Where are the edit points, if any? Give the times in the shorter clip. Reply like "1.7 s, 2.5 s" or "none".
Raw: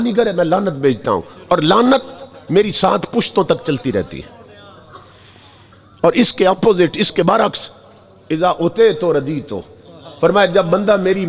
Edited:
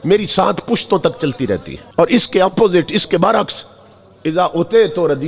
1.8 s